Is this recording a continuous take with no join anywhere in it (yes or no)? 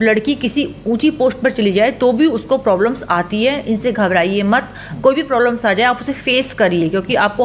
yes